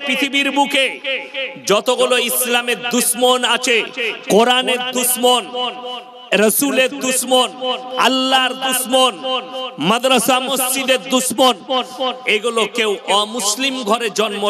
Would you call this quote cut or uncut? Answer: uncut